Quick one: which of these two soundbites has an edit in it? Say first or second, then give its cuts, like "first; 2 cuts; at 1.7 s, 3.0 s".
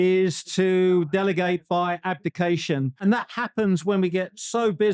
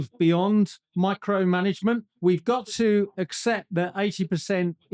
first; 1 cut; at 2.9 s